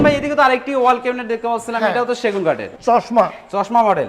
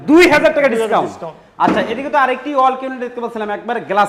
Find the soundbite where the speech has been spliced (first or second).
first